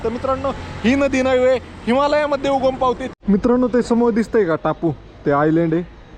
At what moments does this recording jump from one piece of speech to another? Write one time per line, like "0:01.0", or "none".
0:03.1